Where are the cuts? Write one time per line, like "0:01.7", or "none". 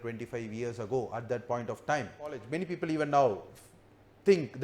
0:02.5

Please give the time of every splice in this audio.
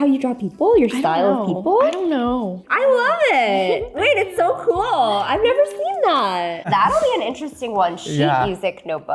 0:02.6
0:06.7

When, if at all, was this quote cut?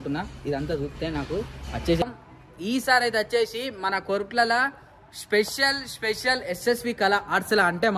0:02.0

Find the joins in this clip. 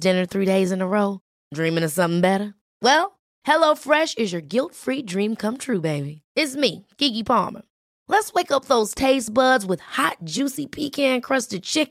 none

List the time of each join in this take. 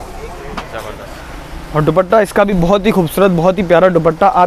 none

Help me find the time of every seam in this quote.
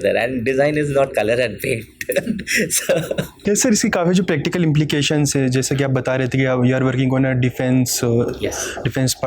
none

